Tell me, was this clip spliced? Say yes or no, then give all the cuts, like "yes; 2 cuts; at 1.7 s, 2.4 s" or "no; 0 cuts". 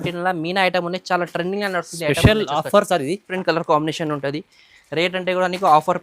yes; 1 cut; at 3.3 s